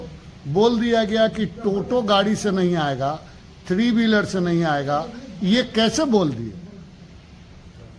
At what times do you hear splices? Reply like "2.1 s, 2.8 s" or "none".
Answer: none